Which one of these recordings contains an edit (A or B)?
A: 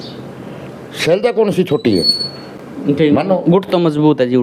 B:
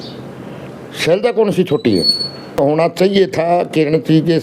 B